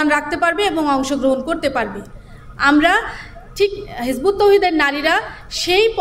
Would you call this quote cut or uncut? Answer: uncut